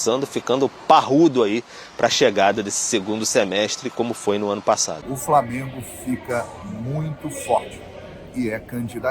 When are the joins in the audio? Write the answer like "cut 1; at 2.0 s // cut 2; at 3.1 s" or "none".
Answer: cut 1; at 4.9 s